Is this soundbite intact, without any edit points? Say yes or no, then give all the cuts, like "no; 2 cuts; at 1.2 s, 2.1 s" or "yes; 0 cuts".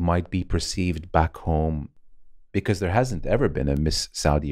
no; 1 cut; at 1.9 s